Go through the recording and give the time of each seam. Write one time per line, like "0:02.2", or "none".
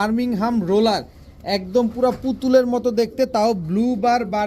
none